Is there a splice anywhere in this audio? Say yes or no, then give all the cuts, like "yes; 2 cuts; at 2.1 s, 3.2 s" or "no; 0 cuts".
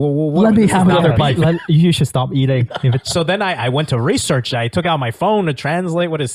no; 0 cuts